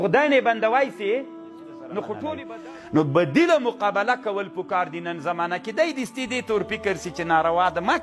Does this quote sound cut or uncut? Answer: cut